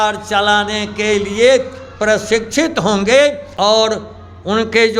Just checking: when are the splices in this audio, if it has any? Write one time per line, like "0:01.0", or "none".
0:03.5